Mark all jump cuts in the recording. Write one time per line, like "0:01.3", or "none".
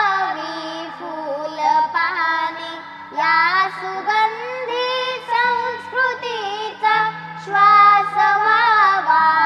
0:03.0